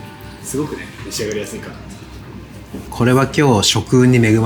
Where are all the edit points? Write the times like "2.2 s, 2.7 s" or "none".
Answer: none